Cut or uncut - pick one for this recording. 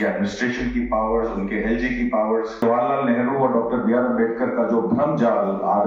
cut